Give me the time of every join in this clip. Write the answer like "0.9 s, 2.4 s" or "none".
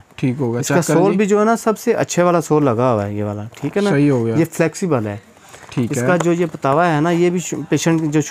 none